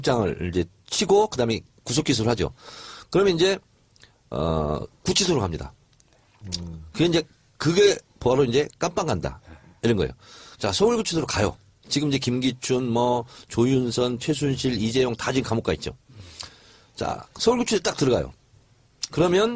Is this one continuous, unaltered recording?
no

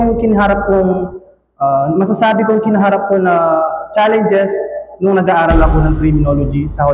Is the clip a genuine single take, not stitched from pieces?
yes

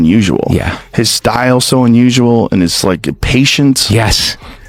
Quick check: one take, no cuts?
yes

